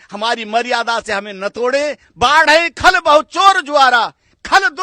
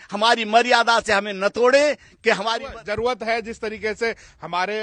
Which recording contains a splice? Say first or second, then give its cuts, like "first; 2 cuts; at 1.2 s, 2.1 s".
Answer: first; 1 cut; at 2.0 s